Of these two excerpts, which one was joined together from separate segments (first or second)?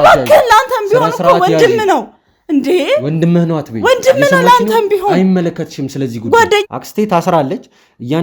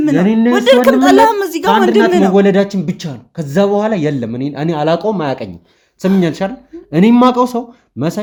first